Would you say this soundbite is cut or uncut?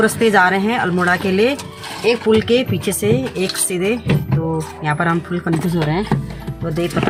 uncut